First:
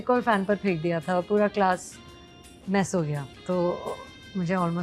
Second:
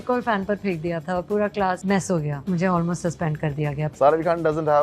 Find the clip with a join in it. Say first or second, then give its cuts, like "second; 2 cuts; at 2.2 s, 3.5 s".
second; 2 cuts; at 2.3 s, 3.8 s